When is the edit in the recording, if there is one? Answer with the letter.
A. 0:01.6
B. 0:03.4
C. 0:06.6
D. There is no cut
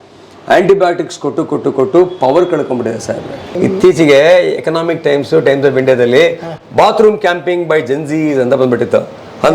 B